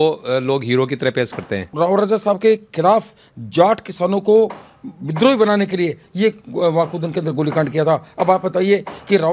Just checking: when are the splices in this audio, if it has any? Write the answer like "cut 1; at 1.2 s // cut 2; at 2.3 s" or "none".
cut 1; at 1.7 s